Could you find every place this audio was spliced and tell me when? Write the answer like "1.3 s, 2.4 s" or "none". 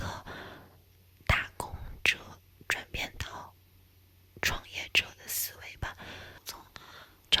6.3 s